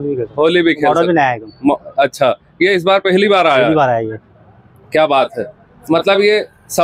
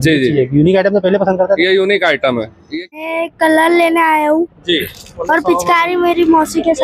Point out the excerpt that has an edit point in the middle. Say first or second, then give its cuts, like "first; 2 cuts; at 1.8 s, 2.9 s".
second; 1 cut; at 2.6 s